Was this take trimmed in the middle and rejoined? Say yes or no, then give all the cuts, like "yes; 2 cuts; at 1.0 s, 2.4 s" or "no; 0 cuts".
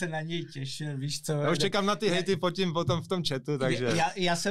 no; 0 cuts